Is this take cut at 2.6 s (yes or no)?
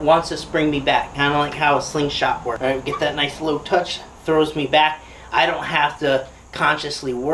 yes